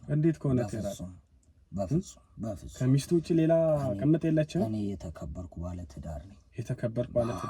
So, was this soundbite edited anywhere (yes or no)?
no